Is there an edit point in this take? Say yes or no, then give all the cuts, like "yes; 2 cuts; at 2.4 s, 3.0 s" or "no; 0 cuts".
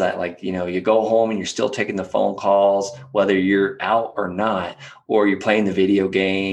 no; 0 cuts